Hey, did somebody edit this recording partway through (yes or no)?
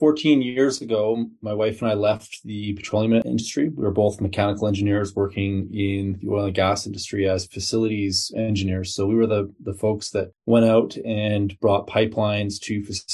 yes